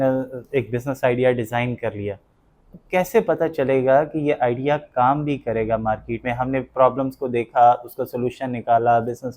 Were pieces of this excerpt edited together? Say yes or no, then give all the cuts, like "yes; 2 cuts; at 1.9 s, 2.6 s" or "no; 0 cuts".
no; 0 cuts